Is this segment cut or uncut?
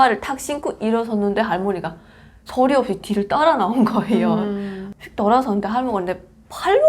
cut